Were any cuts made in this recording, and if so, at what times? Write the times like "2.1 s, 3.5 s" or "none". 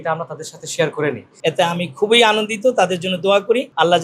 1.4 s